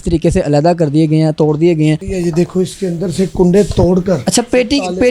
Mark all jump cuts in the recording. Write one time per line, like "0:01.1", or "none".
0:02.1